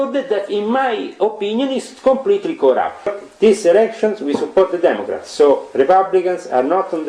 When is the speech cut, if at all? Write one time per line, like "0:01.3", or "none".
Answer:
0:03.1